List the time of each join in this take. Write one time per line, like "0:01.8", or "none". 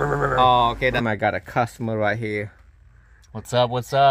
0:01.0